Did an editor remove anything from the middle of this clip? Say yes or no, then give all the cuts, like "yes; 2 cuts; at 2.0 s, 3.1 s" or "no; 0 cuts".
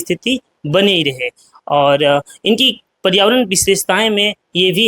no; 0 cuts